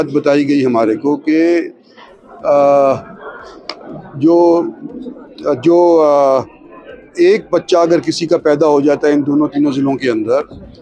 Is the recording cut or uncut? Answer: uncut